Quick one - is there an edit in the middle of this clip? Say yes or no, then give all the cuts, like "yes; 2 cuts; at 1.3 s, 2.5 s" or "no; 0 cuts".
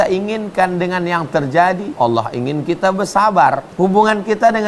yes; 2 cuts; at 1.9 s, 3.7 s